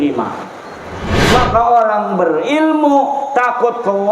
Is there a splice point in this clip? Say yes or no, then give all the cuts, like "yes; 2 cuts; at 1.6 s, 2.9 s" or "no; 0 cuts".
yes; 1 cut; at 1.1 s